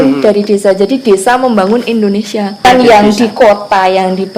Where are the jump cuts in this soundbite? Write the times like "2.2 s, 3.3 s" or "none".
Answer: 2.7 s